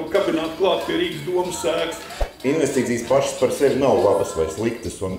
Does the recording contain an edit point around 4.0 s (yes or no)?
no